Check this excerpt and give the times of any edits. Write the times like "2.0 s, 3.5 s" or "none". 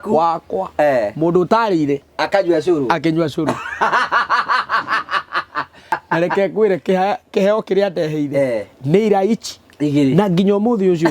5.8 s